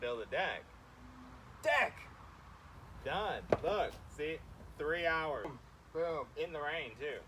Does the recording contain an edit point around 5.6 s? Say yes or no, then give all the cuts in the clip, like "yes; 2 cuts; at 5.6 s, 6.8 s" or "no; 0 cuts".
yes; 1 cut; at 5.6 s